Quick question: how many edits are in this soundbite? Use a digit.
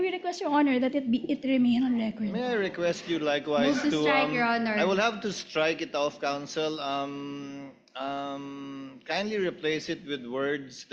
0